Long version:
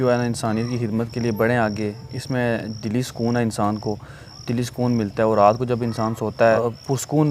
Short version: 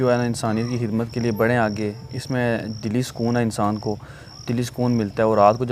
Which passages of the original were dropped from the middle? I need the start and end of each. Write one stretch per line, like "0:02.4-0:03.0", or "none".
none